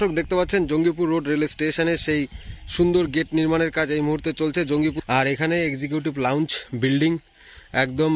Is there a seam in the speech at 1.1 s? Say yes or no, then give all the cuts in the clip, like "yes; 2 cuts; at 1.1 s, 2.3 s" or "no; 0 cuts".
no; 1 cut; at 5.0 s